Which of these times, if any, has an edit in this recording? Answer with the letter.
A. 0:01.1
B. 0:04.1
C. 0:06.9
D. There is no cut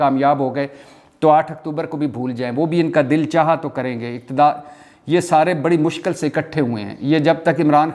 D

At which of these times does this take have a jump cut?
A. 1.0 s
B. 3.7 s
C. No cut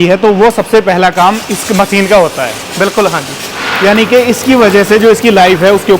B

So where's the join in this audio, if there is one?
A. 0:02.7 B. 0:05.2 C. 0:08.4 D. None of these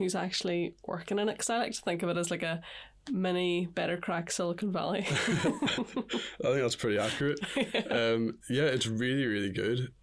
D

